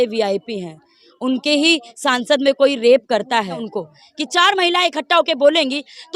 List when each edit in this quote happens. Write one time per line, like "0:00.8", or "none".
0:03.6